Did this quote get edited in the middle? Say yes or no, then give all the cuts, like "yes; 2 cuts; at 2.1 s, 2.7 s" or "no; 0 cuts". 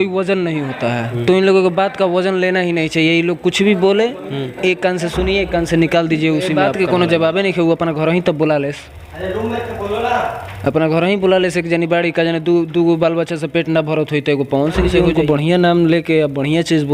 yes; 2 cuts; at 6.5 s, 14.9 s